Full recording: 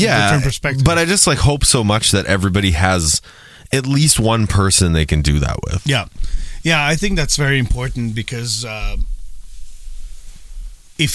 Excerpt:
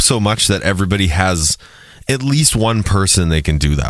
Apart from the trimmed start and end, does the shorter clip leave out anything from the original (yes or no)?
no